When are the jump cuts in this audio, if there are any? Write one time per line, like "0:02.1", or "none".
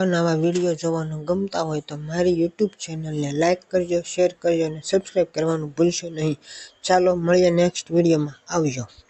none